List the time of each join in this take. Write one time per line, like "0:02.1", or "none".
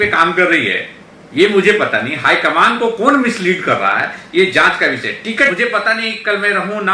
0:05.5